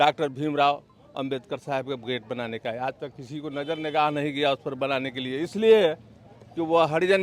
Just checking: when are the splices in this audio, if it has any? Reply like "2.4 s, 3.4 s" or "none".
none